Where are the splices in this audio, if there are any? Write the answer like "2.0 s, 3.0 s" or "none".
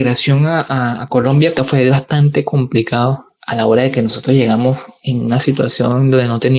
none